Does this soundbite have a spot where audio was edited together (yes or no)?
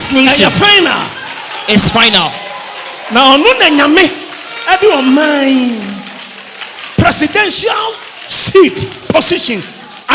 no